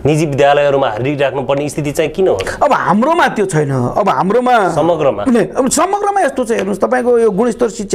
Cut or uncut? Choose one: uncut